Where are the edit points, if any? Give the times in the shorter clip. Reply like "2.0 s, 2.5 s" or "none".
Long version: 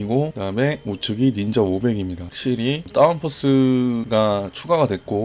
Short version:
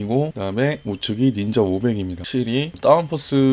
2.2 s